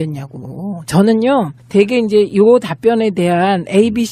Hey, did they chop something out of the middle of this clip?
yes; 1 cut; at 0.9 s

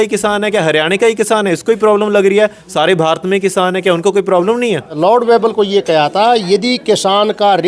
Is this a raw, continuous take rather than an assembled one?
no; 1 cut; at 5.0 s

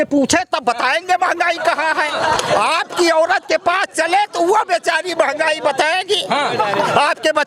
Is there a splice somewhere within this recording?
no; 0 cuts

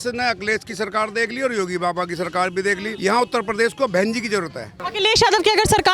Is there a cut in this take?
yes; 2 cuts; at 2.9 s, 4.8 s

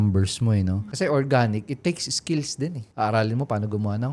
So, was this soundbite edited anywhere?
yes; 2 cuts; at 0.8 s, 2.8 s

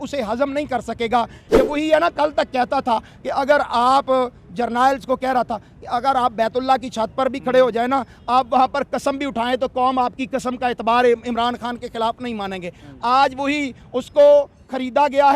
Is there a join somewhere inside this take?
yes; 1 cut; at 1.4 s

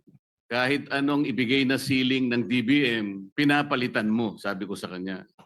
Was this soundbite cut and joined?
yes; 1 cut; at 3.2 s

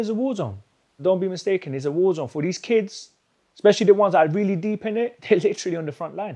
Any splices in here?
yes; 2 cuts; at 1.0 s, 5.2 s

